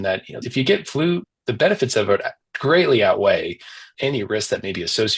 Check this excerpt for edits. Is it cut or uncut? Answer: uncut